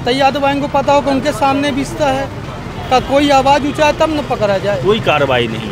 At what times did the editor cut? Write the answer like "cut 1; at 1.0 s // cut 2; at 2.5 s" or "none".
none